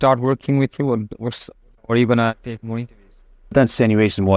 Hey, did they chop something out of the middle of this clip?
no; 0 cuts

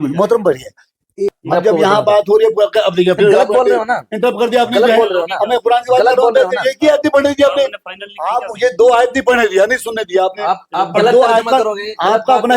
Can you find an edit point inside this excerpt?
yes; 1 cut; at 1.4 s

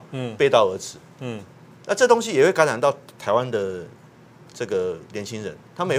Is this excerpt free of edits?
yes; 0 cuts

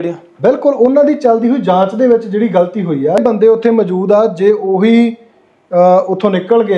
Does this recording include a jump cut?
yes; 1 cut; at 3.2 s

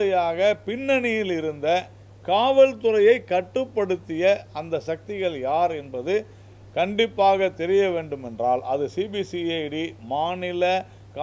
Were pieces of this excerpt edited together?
no; 0 cuts

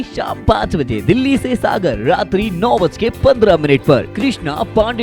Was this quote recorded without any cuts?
yes; 0 cuts

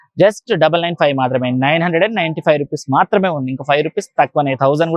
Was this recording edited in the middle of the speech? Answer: no; 0 cuts

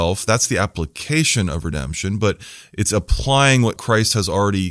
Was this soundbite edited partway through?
yes; 1 cut; at 3.8 s

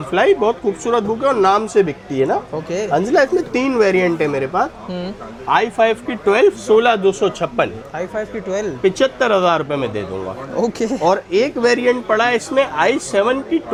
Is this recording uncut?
yes; 0 cuts

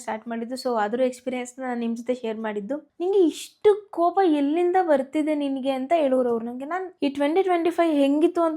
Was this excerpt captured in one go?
no; 2 cuts; at 2.9 s, 6.9 s

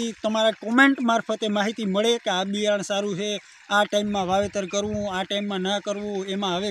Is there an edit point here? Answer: no; 0 cuts

